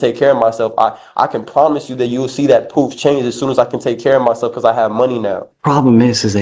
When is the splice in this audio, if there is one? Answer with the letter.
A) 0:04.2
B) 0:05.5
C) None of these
B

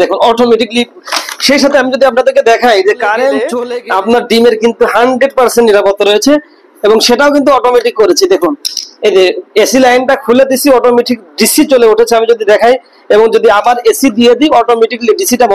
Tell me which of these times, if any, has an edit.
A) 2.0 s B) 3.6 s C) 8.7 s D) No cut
B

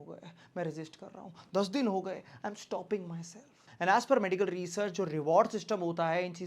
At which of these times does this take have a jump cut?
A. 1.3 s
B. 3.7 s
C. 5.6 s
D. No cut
D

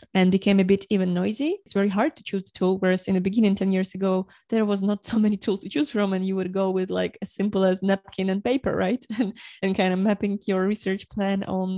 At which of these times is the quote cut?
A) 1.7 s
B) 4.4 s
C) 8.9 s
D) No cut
A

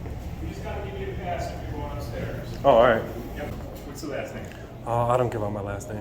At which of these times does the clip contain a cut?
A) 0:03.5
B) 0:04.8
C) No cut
A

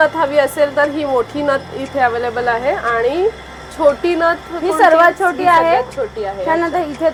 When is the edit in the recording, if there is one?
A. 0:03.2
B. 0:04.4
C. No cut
C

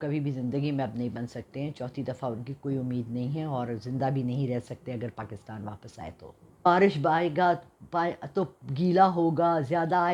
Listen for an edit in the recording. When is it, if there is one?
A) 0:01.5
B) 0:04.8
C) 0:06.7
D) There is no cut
C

